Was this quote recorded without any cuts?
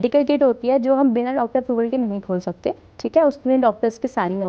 yes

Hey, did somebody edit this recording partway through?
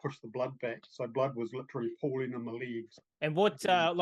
yes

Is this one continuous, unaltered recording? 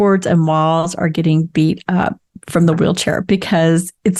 yes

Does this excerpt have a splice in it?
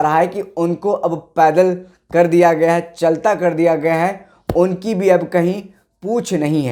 no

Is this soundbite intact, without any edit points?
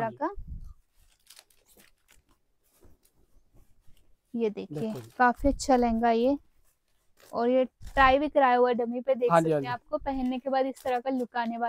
yes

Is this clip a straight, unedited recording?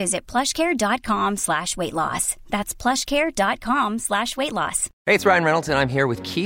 no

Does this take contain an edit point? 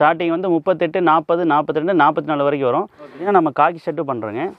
yes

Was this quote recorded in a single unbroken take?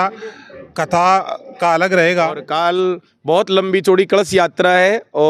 no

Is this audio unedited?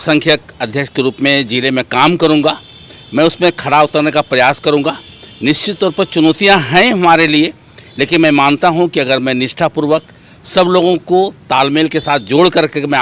yes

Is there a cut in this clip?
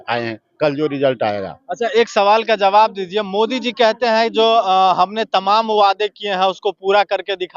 no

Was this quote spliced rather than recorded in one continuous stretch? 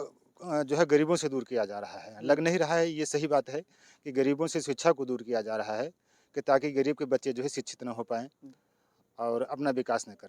no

